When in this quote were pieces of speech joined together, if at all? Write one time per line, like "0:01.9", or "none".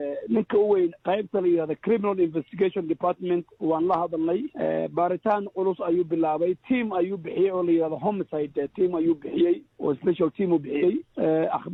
none